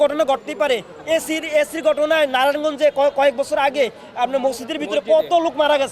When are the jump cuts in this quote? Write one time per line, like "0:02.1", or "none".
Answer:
none